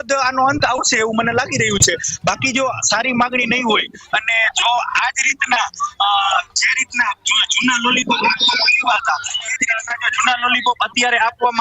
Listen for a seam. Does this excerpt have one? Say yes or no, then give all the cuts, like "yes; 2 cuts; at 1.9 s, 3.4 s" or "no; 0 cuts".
no; 0 cuts